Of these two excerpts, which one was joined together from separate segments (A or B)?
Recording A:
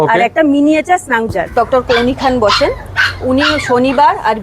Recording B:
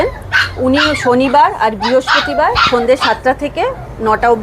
A